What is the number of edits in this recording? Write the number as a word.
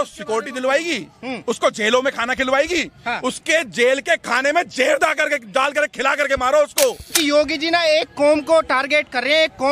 one